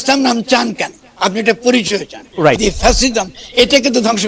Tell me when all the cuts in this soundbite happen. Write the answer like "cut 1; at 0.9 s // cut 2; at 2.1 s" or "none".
cut 1; at 2.5 s